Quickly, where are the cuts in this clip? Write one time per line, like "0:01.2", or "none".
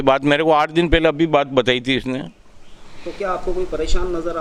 none